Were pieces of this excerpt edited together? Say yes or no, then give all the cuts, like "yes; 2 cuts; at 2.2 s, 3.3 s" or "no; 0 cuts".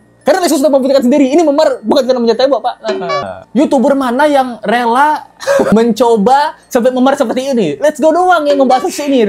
yes; 2 cuts; at 3.4 s, 5.7 s